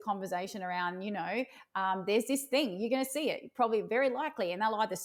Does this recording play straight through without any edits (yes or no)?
yes